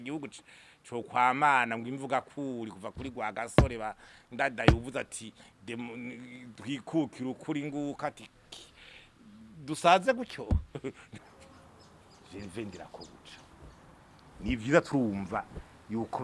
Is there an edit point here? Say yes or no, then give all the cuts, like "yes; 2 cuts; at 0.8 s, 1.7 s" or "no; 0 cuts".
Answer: yes; 1 cut; at 11.1 s